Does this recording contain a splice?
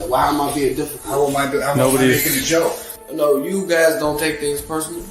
yes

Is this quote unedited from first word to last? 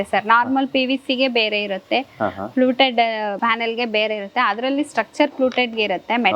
no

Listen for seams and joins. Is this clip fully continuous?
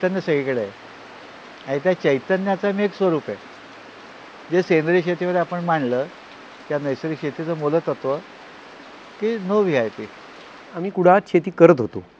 no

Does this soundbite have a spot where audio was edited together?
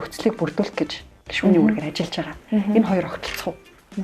no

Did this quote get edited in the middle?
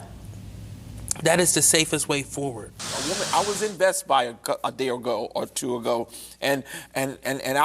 yes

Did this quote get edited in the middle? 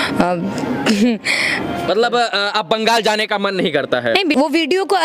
yes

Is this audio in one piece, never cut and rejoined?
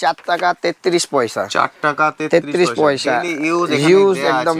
yes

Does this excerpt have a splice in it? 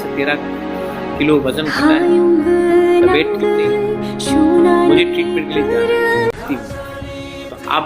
yes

